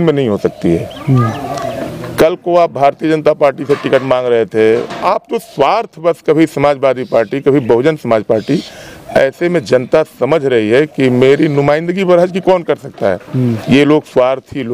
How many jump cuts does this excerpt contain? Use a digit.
2